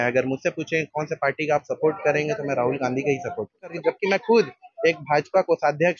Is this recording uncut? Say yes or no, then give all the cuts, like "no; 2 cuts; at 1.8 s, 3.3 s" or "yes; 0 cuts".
no; 1 cut; at 3.8 s